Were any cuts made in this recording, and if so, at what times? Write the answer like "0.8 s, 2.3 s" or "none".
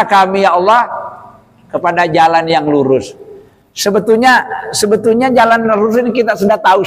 none